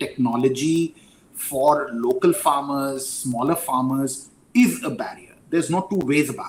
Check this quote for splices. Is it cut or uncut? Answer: uncut